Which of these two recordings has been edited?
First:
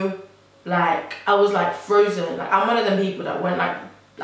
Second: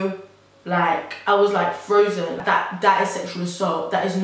second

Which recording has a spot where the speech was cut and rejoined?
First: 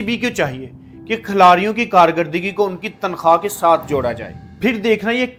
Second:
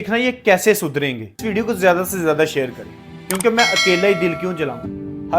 second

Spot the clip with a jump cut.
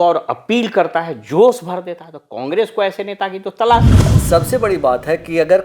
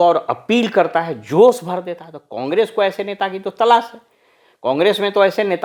first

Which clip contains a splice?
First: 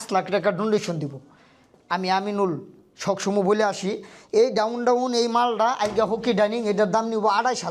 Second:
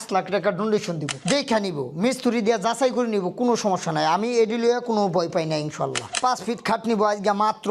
second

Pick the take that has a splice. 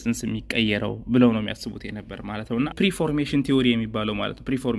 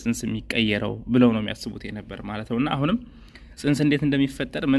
first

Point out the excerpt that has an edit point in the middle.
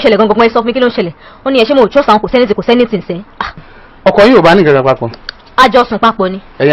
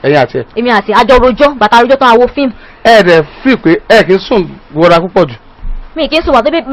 first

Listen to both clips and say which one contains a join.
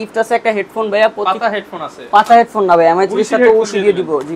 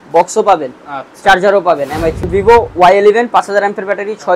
second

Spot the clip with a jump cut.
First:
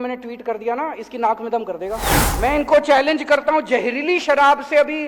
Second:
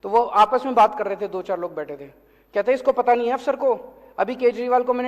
first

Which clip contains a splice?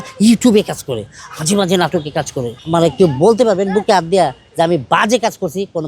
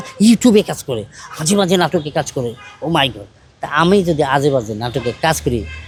first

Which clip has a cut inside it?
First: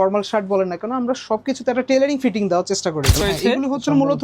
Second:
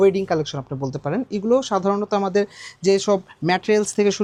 first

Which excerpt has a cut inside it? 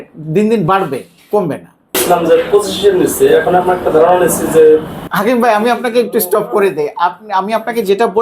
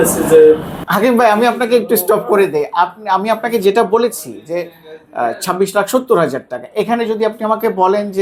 first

